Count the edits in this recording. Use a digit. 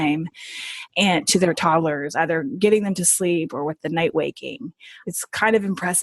1